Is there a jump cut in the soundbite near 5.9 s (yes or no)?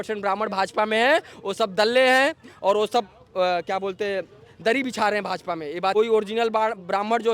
yes